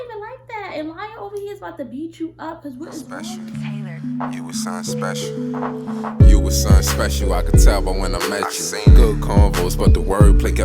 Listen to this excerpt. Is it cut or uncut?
cut